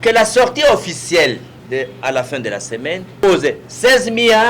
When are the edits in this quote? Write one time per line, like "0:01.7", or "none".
0:01.5
0:03.2